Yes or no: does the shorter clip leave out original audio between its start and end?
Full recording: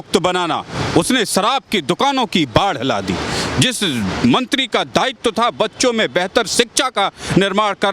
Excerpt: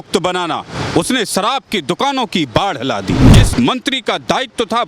yes